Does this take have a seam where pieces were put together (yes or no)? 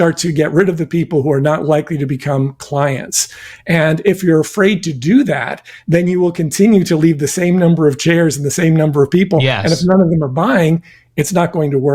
no